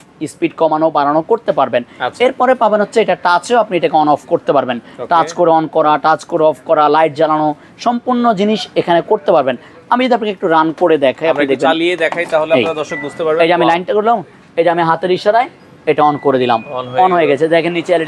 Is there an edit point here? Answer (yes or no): no